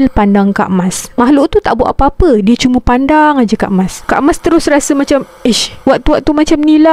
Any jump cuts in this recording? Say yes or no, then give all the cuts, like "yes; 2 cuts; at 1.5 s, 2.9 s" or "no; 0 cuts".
no; 0 cuts